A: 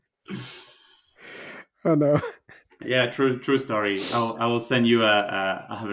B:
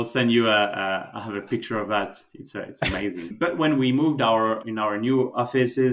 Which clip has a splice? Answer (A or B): B